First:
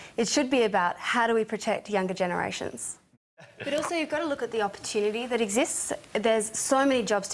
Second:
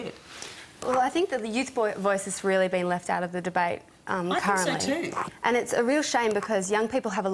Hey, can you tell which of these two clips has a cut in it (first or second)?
first